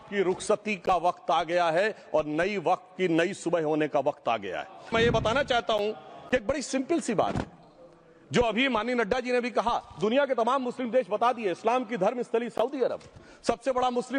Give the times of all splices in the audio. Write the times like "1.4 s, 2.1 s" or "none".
4.9 s